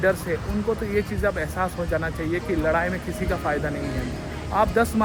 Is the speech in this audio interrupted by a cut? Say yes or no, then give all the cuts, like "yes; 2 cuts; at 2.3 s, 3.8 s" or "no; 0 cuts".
no; 0 cuts